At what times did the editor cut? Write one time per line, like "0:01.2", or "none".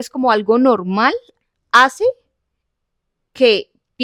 none